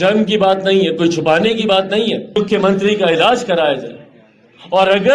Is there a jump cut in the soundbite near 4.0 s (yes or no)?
no